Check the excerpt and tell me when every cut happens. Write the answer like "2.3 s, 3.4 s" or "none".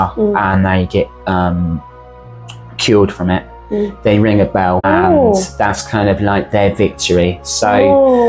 4.8 s